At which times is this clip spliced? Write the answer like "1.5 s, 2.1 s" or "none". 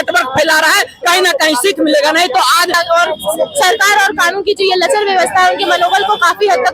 2.7 s